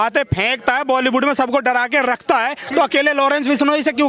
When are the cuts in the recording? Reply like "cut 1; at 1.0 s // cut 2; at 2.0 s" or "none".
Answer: none

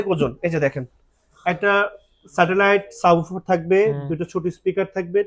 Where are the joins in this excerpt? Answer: none

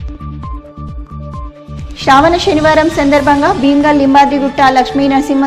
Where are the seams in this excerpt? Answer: none

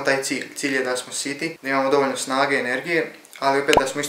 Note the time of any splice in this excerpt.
cut 1; at 1.6 s

